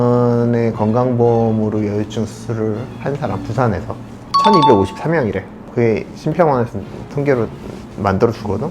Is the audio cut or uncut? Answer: uncut